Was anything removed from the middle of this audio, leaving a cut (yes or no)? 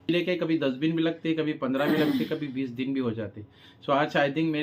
no